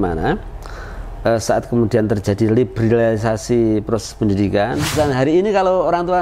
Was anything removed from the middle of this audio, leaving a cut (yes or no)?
yes